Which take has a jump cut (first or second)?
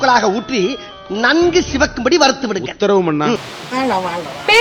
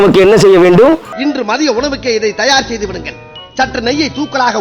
first